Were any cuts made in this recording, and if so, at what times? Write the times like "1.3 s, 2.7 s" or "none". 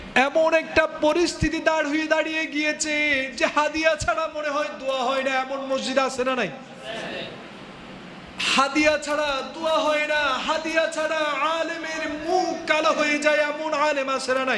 none